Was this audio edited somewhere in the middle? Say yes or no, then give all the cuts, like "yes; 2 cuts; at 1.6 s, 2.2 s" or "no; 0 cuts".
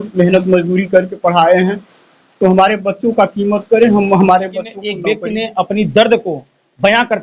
yes; 1 cut; at 4.8 s